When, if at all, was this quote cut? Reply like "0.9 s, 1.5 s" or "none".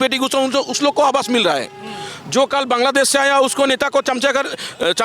none

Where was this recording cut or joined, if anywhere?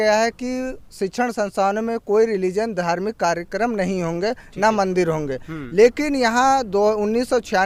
none

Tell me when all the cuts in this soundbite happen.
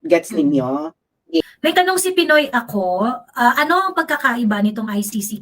1.4 s

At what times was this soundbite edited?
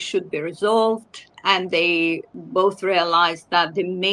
1.3 s, 2.3 s

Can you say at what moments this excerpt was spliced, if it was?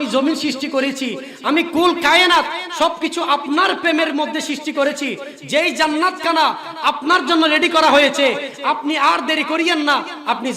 none

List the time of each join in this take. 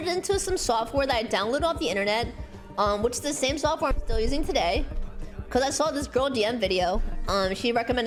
none

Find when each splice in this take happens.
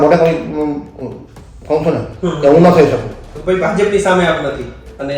3.2 s

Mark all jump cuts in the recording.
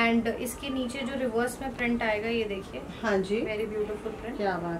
none

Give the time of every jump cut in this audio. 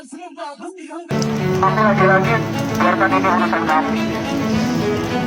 1.1 s

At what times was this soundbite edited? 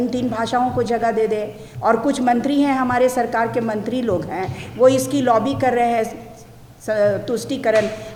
none

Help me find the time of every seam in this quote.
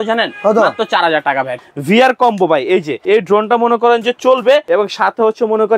1.6 s, 2.9 s, 4.6 s

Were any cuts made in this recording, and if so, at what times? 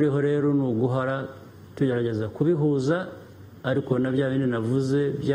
none

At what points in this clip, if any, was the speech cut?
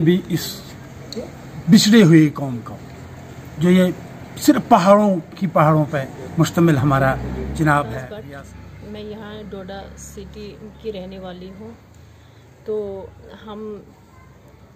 8.1 s

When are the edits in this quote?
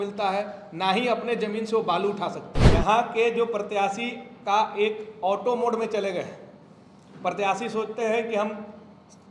2.5 s

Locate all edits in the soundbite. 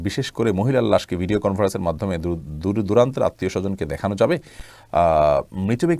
none

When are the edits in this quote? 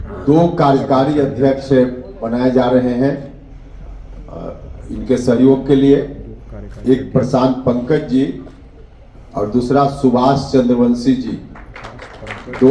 none

